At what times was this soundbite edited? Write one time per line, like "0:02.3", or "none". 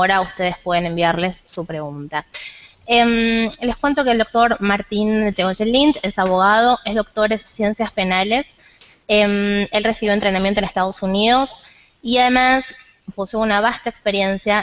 none